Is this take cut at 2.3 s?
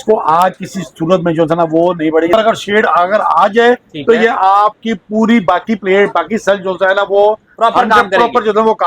yes; 1 cut; at 2.3 s

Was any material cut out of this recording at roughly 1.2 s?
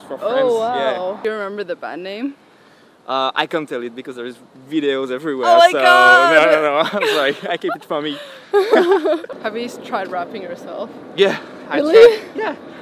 yes; 2 cuts; at 1.2 s, 9.3 s

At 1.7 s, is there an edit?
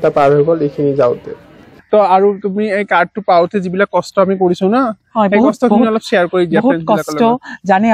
yes; 1 cut; at 1.7 s

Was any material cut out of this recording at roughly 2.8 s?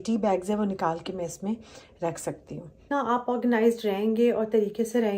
yes; 1 cut; at 2.8 s

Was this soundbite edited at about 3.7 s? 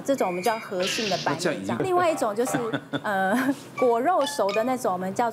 no; 1 cut; at 1.8 s

